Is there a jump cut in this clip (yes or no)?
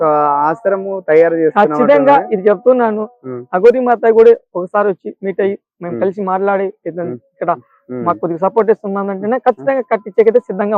no